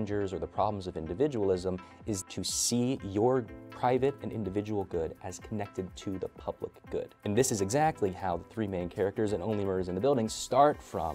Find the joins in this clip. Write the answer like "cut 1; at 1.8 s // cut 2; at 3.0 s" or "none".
cut 1; at 2.2 s // cut 2; at 7.3 s